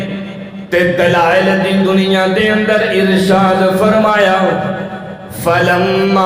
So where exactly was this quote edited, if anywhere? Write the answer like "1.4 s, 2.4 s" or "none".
none